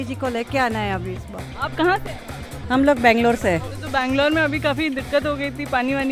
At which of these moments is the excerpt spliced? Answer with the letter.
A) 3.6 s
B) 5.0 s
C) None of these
C